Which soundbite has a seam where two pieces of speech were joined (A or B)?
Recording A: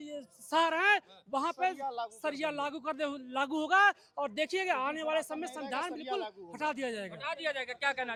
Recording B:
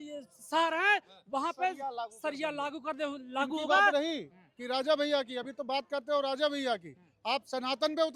B